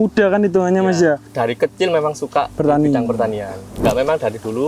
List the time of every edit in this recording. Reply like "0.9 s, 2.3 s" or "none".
1.3 s, 2.5 s, 3.7 s